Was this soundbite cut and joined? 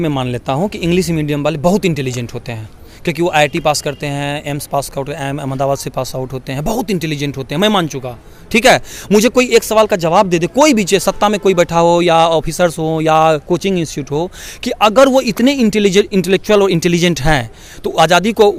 no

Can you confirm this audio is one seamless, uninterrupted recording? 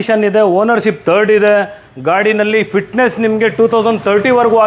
yes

